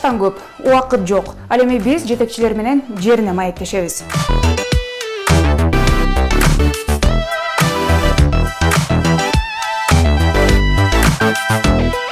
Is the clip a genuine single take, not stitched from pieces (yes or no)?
yes